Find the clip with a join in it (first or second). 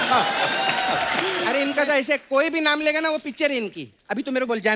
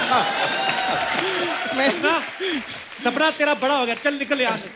first